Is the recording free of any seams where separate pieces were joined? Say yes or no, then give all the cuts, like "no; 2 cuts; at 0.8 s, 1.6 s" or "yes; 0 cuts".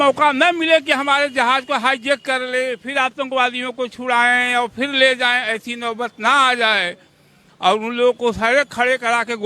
yes; 0 cuts